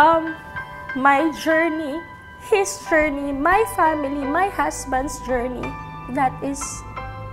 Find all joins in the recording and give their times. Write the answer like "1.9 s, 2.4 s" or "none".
none